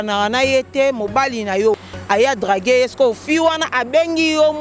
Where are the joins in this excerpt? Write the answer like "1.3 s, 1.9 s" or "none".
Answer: 1.8 s